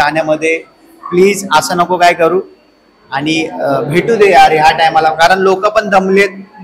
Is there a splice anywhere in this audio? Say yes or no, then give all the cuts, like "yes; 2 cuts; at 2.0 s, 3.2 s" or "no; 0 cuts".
no; 0 cuts